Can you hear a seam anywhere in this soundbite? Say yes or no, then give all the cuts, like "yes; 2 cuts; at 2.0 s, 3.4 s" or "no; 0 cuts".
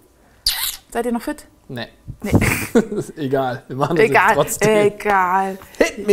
yes; 1 cut; at 3.7 s